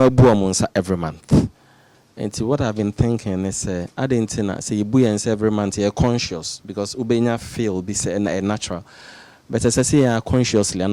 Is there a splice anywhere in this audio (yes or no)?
no